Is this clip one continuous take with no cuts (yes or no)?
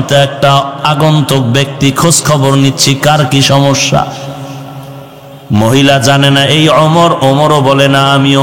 yes